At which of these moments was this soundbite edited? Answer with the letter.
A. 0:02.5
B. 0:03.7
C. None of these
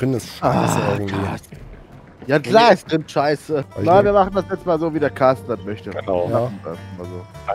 B